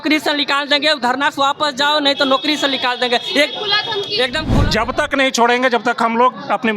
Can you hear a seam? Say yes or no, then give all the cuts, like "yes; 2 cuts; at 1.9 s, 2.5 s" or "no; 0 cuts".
yes; 1 cut; at 4.5 s